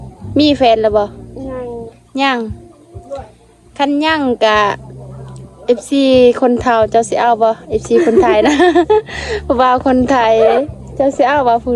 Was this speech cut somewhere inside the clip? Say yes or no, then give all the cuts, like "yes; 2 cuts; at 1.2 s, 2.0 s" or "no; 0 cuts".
no; 0 cuts